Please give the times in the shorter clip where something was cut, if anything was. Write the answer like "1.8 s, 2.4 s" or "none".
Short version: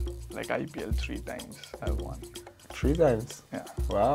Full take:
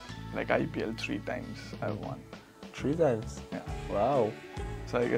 none